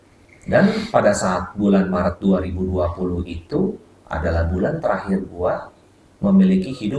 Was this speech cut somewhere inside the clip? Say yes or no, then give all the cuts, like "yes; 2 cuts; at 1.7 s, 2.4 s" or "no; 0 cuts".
no; 0 cuts